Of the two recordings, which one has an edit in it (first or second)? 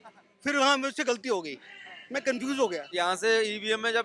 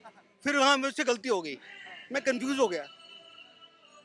first